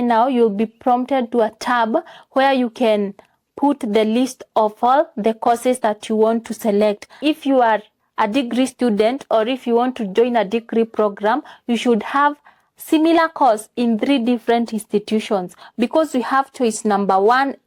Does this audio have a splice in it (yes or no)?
yes